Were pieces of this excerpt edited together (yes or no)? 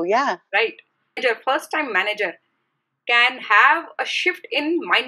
yes